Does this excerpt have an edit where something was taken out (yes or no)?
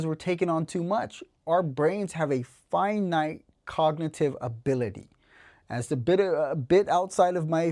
no